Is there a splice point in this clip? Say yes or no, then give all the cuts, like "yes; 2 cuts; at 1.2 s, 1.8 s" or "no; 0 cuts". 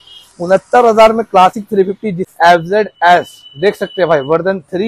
yes; 1 cut; at 2.2 s